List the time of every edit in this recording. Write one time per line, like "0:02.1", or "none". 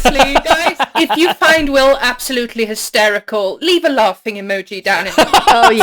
none

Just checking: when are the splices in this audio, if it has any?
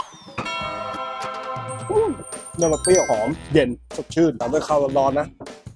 none

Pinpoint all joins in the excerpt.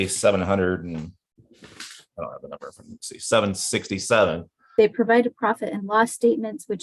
0:04.7

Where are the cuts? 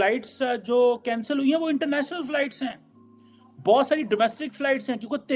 none

